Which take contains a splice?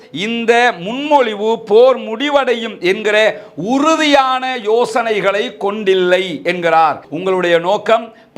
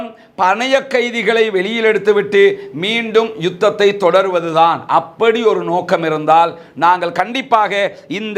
first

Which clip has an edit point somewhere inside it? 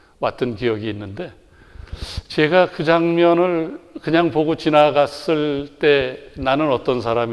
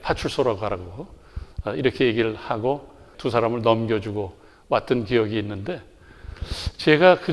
second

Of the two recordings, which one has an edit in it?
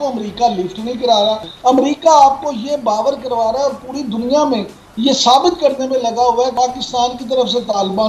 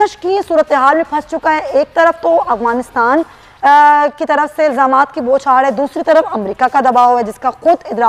first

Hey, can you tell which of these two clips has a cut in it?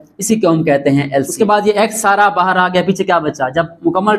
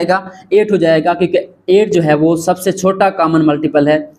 first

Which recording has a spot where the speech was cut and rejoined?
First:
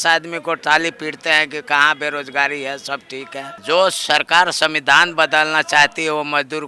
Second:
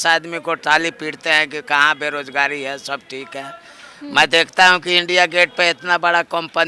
first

